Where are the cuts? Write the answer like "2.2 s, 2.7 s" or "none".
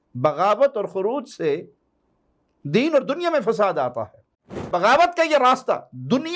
4.7 s